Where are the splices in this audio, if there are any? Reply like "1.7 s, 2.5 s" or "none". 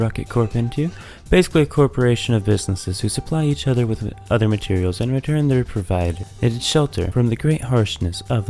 6.2 s, 7.1 s